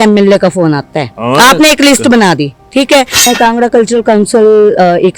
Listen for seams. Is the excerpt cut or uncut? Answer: cut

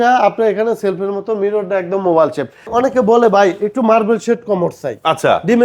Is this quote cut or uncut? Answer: cut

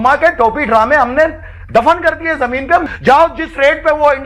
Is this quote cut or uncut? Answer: cut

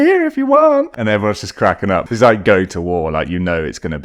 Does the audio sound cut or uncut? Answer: cut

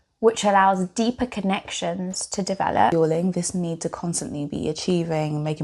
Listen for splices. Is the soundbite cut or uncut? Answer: cut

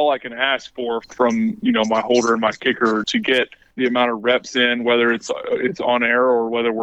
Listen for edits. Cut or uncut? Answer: cut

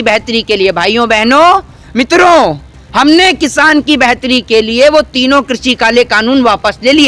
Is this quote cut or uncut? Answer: uncut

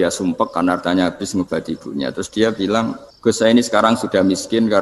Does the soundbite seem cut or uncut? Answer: cut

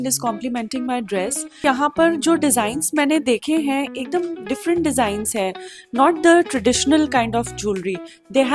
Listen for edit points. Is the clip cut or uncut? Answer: cut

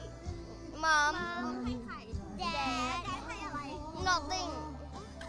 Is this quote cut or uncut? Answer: uncut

